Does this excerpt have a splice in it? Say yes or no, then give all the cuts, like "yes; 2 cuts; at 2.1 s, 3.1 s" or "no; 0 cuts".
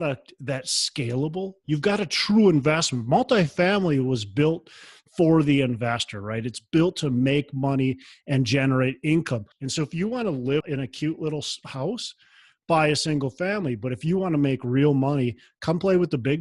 yes; 2 cuts; at 9.6 s, 10.6 s